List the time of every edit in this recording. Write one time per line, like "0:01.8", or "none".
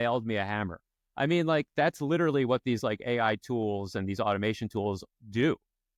none